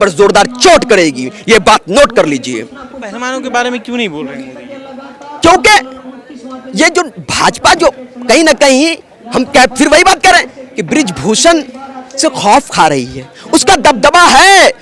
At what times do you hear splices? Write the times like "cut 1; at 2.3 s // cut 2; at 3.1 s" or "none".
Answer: none